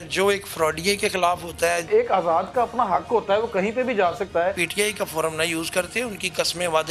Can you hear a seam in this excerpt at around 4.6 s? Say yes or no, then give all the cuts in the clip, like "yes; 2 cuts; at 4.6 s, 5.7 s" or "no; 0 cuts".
yes; 2 cuts; at 1.8 s, 4.6 s